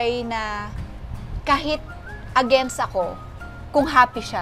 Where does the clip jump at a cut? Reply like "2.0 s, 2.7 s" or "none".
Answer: none